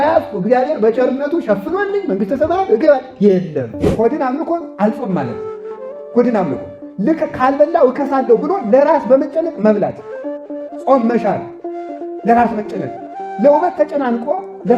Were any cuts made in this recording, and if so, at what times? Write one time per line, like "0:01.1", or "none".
0:03.8